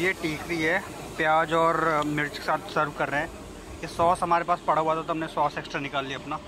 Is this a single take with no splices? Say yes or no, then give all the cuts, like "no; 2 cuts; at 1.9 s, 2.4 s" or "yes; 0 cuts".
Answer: yes; 0 cuts